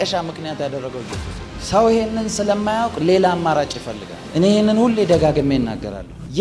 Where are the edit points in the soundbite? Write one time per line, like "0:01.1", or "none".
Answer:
0:04.2